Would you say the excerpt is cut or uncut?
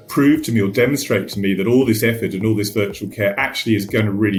uncut